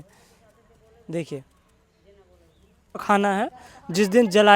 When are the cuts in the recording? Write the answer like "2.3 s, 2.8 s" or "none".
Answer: 3.0 s